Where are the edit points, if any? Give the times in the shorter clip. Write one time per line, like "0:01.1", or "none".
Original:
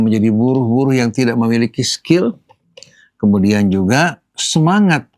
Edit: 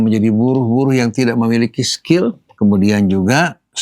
0:02.5

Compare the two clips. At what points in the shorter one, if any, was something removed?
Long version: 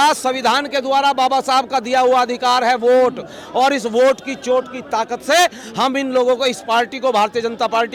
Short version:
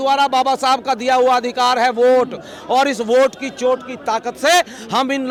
none

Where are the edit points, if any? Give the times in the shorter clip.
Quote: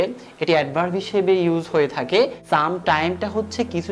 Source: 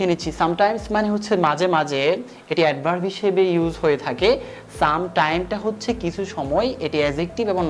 0:02.4

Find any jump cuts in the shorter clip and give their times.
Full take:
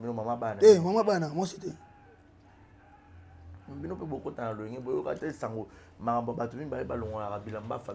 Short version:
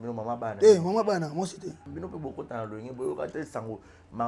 0:01.8

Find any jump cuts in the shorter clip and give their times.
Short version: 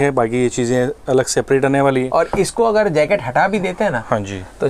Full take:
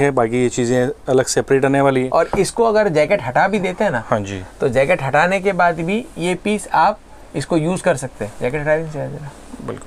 none

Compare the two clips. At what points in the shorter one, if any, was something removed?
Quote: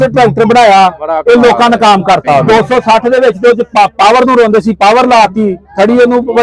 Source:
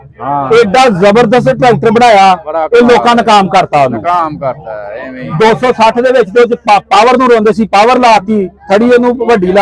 0:02.4

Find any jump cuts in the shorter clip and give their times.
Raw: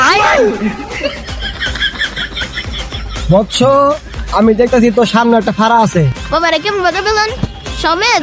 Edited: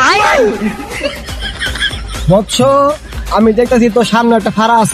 0:01.9

